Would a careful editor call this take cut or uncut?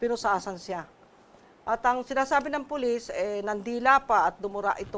uncut